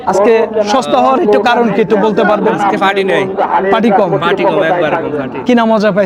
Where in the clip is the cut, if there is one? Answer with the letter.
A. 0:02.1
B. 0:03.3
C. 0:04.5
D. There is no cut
D